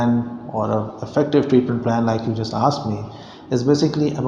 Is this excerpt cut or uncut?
uncut